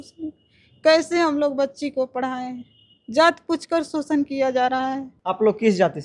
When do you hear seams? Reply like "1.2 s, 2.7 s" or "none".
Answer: 5.1 s